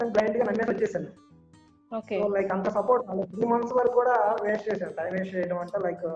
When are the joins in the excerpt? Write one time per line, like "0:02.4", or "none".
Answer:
none